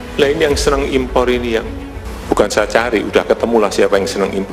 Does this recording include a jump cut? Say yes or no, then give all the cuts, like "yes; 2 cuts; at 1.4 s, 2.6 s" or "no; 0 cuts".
no; 0 cuts